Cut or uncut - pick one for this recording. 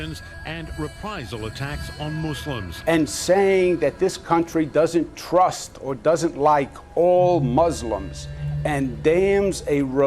cut